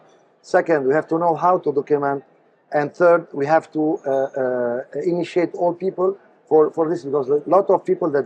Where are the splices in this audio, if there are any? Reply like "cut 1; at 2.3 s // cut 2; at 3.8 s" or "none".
none

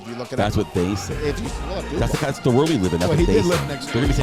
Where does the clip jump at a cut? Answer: none

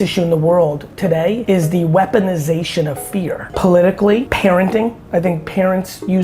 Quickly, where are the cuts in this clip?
cut 1; at 1.1 s // cut 2; at 3.5 s // cut 3; at 4.3 s // cut 4; at 5.0 s

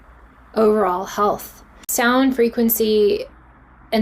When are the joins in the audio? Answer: cut 1; at 1.8 s

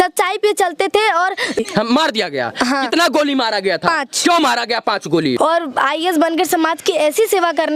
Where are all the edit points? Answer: cut 1; at 1.6 s // cut 2; at 5.4 s

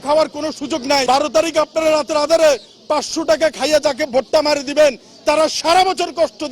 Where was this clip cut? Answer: cut 1; at 1.0 s

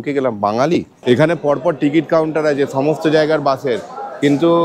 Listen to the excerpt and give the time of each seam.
cut 1; at 0.9 s

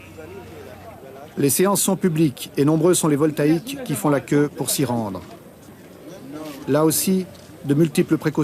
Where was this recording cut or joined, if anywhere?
cut 1; at 7.4 s

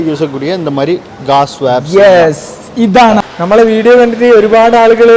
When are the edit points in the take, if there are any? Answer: cut 1; at 3.2 s

